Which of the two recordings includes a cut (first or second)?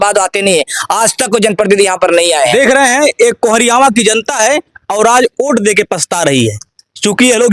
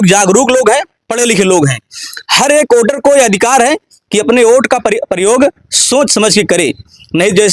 first